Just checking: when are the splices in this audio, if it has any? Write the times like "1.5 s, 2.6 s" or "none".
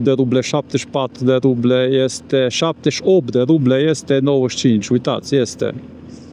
none